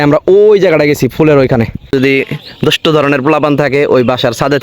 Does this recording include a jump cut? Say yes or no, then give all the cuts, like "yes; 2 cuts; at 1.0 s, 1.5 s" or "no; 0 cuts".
yes; 1 cut; at 1.9 s